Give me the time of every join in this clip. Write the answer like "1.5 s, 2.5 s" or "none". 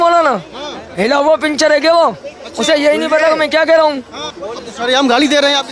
none